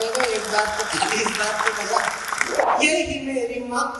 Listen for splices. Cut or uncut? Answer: cut